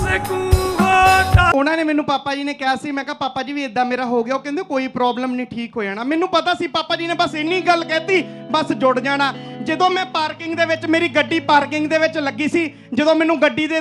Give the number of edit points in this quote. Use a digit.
1